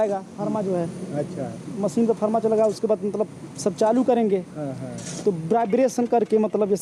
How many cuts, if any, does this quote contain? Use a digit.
0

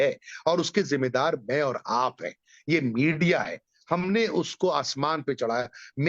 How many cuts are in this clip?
0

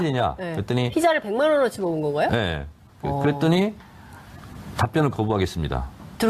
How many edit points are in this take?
0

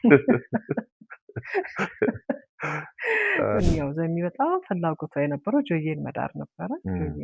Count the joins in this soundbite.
1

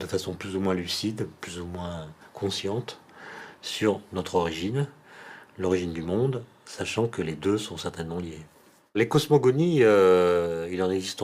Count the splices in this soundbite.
1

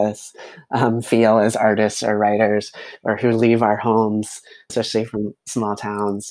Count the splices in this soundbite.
1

